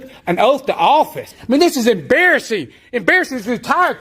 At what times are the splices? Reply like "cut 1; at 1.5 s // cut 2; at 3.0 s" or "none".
cut 1; at 1.3 s